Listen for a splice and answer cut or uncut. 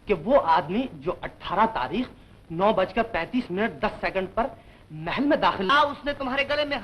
cut